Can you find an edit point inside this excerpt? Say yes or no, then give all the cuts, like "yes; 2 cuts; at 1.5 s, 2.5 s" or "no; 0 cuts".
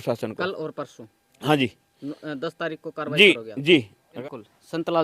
yes; 1 cut; at 4.1 s